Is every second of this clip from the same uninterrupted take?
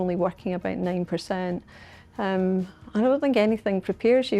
yes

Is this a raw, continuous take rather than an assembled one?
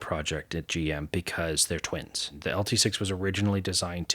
no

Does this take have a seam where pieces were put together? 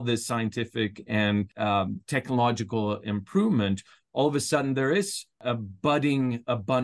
no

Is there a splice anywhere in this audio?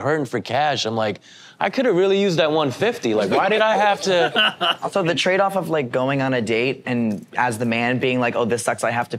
yes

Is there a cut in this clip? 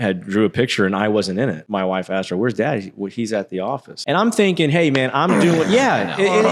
yes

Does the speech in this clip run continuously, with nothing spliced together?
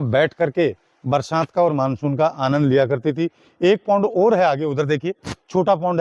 yes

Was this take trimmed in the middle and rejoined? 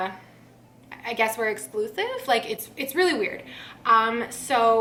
no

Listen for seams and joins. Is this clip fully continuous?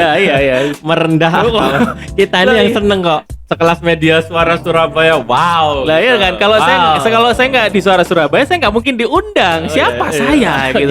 no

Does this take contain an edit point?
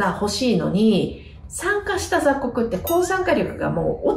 no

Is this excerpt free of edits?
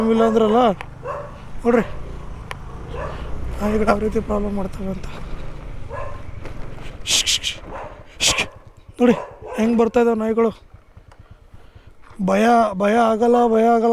yes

